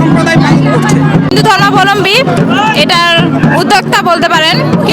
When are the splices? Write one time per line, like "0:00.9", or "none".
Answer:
0:01.3